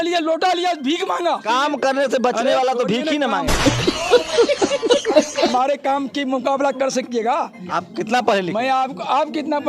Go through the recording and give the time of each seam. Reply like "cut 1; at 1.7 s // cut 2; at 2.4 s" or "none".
cut 1; at 1.4 s // cut 2; at 3.5 s // cut 3; at 5.5 s // cut 4; at 7.6 s